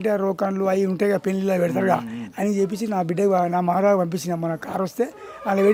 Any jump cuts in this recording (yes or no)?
no